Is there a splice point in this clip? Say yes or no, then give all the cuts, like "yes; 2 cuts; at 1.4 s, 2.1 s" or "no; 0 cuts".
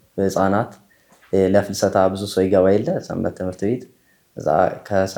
no; 0 cuts